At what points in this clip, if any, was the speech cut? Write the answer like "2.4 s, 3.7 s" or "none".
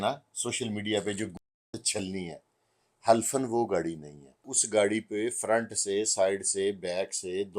4.6 s